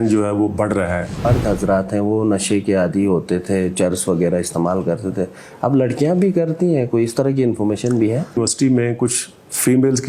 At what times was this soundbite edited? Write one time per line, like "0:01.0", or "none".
0:01.2
0:08.4